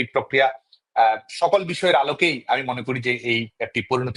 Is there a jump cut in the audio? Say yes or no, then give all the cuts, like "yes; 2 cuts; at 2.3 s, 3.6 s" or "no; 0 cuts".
no; 0 cuts